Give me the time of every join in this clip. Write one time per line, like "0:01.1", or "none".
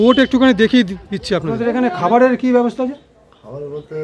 0:01.6